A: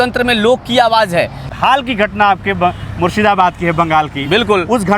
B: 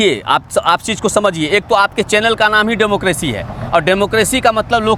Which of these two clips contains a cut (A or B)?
A